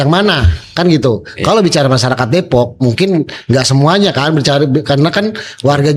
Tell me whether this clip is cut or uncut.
uncut